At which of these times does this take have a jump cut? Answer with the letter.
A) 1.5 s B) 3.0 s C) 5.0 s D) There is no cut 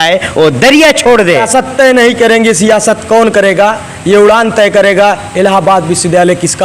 A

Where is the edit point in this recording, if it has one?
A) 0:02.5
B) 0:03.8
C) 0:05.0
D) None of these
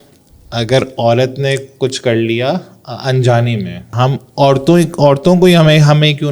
B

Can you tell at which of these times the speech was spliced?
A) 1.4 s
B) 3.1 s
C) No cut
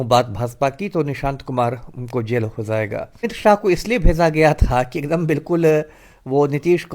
B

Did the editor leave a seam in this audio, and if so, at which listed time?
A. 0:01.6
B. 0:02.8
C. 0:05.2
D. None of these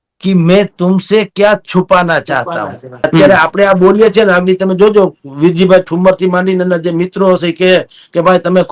B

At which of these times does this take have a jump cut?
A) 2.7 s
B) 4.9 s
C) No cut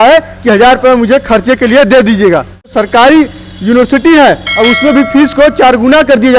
A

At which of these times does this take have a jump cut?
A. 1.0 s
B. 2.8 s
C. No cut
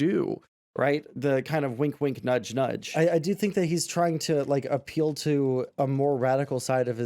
B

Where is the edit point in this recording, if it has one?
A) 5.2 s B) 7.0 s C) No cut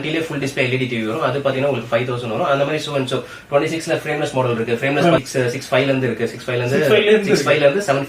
A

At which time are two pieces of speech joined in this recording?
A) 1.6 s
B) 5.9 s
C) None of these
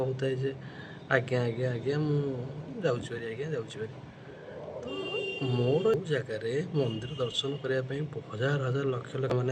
B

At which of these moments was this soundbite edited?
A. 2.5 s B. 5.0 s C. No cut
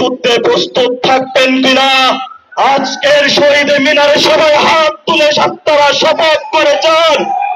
C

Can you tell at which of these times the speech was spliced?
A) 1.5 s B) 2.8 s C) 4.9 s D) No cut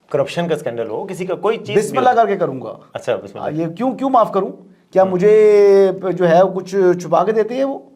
D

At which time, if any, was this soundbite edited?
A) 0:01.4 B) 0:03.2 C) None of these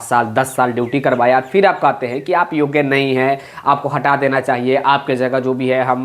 C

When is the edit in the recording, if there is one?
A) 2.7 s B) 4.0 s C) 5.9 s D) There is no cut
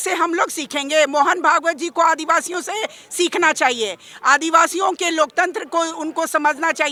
D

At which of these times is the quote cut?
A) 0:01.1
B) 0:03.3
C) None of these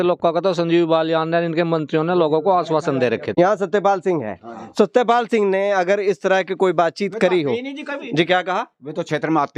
B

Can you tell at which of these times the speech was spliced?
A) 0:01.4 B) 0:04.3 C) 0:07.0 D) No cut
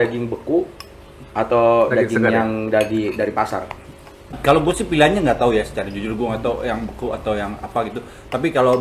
B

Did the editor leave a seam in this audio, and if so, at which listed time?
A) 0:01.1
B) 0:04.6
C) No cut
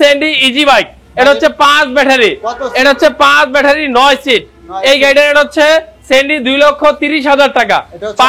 C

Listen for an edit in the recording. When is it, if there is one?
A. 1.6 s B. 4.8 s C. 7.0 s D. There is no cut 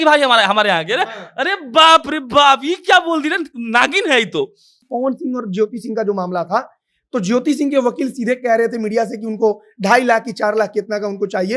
B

